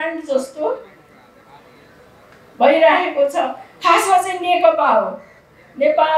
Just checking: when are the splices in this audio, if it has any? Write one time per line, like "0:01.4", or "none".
none